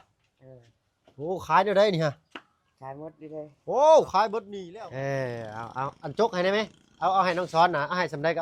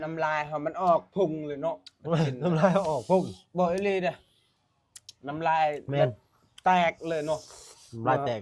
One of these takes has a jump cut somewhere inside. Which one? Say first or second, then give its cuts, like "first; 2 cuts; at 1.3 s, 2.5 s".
first; 1 cut; at 4.5 s